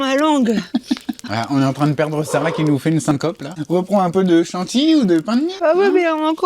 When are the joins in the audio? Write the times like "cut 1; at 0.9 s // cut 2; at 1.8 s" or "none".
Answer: cut 1; at 1.2 s // cut 2; at 3.5 s // cut 3; at 5.5 s